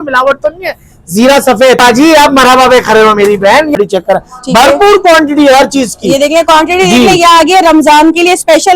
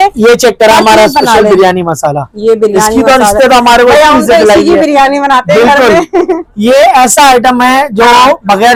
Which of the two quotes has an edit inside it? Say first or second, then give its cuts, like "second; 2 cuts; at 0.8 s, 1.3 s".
first; 2 cuts; at 1.8 s, 3.8 s